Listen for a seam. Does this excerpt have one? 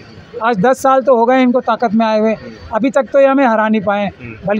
no; 0 cuts

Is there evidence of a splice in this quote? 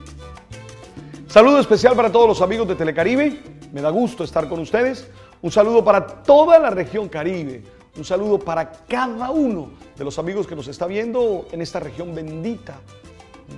yes; 1 cut; at 10.3 s

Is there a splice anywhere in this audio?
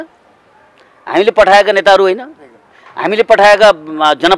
no; 0 cuts

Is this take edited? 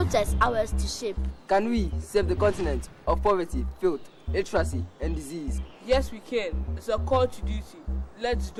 no; 0 cuts

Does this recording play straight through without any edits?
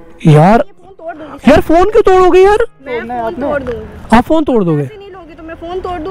no; 1 cut; at 2.8 s

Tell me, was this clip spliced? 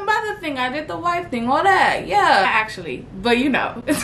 no; 0 cuts

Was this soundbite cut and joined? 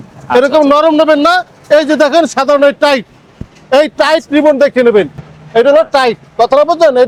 no; 0 cuts

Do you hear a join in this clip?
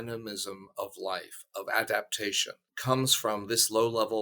yes; 1 cut; at 2.7 s

